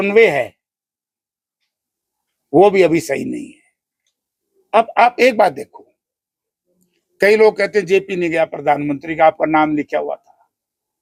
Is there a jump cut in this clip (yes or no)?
no